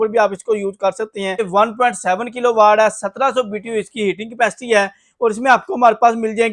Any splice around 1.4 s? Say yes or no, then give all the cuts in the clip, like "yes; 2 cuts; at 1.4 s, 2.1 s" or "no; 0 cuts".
yes; 1 cut; at 1.4 s